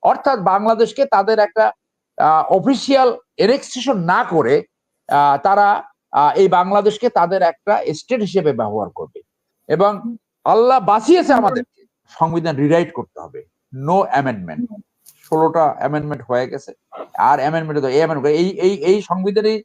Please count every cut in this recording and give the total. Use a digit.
1